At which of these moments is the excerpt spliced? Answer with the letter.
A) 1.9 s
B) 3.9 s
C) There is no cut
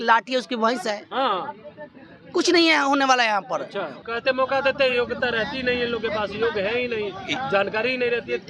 B